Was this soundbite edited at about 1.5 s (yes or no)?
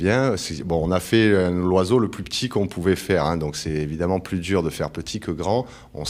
no